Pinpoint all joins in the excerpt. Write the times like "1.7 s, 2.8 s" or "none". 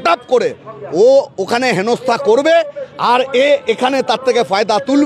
none